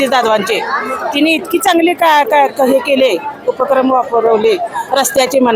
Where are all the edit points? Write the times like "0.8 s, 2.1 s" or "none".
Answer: none